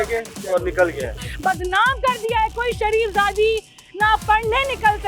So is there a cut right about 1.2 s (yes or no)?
yes